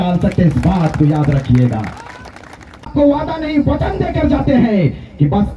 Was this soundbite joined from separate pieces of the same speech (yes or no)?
yes